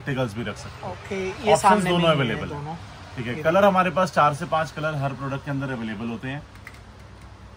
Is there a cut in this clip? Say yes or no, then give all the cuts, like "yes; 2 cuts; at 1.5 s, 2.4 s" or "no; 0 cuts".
no; 0 cuts